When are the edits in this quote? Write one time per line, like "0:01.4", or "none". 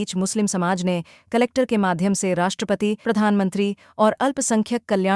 none